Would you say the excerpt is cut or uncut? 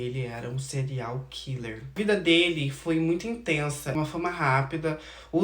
cut